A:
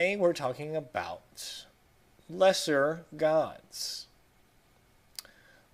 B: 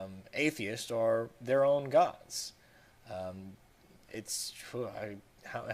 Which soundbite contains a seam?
B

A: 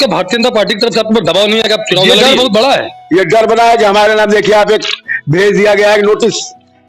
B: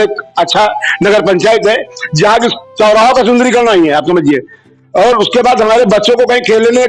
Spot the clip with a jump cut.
A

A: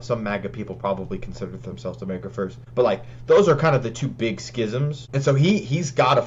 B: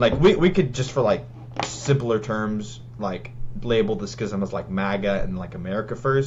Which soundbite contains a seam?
A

